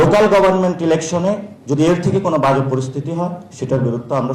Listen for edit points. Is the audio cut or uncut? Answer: uncut